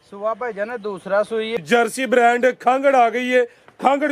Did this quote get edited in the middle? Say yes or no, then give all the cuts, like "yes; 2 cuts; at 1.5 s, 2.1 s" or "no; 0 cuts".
yes; 1 cut; at 1.6 s